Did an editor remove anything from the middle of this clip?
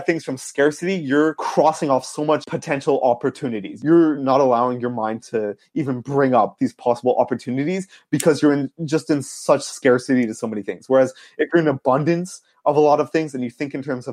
yes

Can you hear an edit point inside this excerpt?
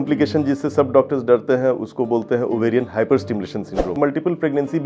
yes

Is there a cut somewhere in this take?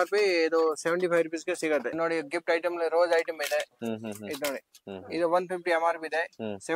yes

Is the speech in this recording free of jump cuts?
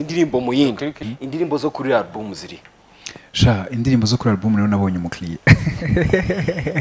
no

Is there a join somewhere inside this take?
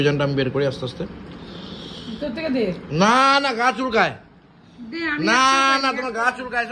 no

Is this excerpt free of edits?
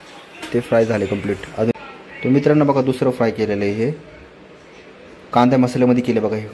no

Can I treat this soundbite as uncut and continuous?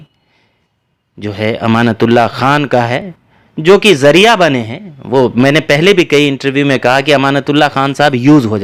yes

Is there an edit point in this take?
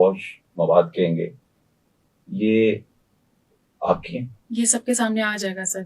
yes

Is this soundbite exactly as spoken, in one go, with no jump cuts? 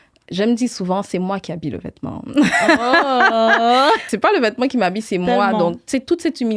no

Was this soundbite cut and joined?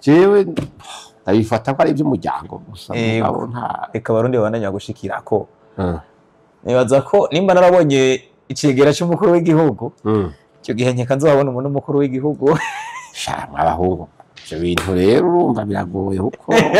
no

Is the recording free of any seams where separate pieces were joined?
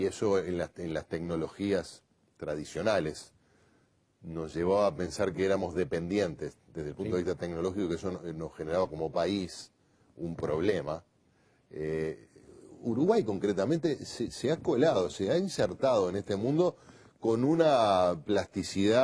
yes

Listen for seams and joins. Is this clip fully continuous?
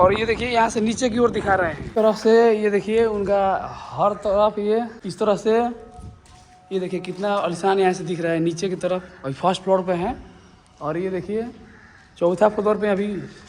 no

